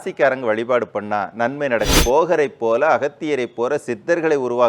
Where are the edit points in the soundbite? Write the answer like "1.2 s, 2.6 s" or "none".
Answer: 2.0 s